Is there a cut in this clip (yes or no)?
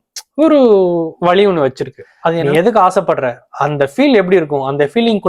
yes